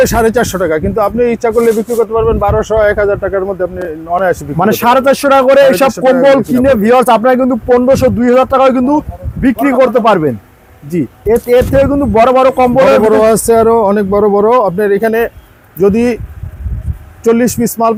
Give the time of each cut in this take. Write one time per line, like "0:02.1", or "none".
none